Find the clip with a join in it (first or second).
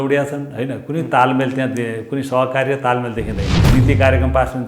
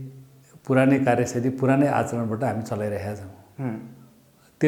first